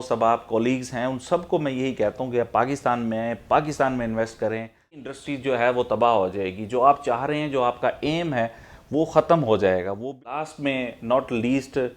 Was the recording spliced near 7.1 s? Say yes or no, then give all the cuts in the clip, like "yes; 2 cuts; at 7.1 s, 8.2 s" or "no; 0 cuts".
no; 2 cuts; at 5.1 s, 10.4 s